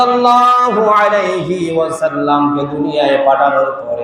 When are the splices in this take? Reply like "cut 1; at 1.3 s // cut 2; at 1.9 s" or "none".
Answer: none